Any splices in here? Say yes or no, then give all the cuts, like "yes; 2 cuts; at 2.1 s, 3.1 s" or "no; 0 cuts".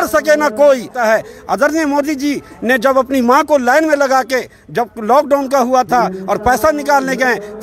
yes; 1 cut; at 0.9 s